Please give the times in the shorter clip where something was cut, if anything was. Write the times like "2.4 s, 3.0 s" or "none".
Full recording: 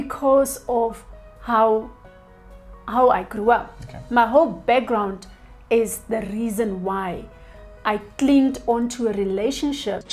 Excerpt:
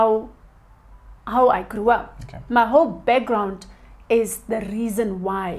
none